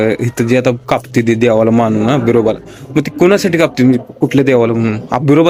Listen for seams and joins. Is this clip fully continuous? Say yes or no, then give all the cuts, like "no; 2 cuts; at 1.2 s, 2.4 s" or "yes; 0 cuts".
yes; 0 cuts